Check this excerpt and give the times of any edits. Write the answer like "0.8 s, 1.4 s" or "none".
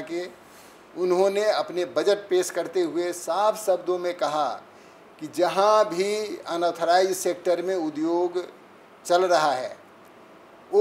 none